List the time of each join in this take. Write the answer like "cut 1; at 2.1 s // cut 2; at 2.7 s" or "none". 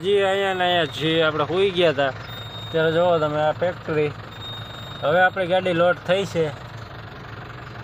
none